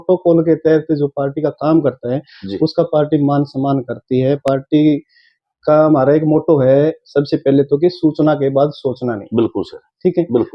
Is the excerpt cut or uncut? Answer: uncut